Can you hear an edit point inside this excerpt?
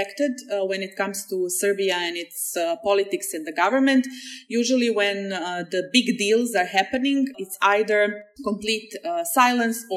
no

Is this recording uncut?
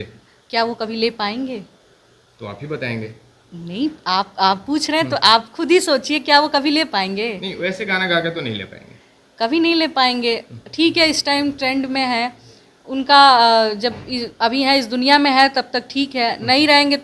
yes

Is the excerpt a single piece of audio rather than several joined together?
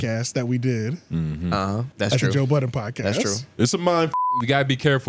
no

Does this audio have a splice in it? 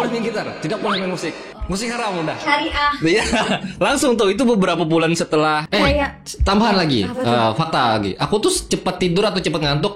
yes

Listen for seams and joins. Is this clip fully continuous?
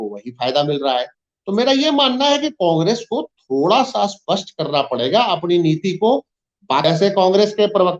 no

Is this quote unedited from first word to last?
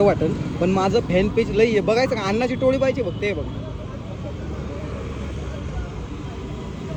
yes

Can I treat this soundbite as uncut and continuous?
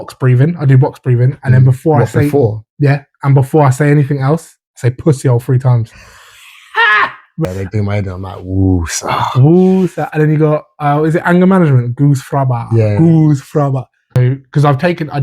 no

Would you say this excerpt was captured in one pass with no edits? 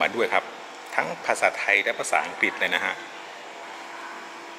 no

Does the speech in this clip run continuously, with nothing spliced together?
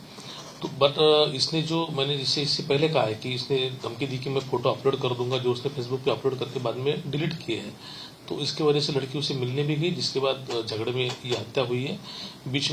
yes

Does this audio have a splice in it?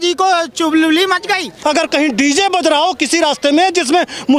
yes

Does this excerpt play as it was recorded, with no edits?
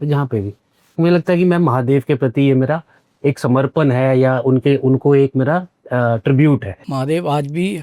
no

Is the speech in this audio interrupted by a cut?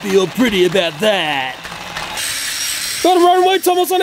yes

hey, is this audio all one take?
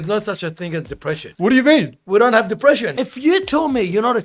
no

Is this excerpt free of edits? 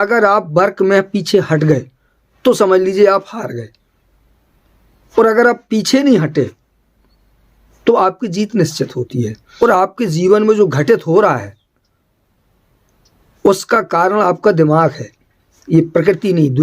no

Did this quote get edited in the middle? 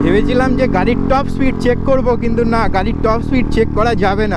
no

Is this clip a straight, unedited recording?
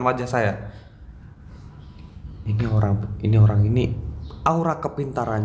yes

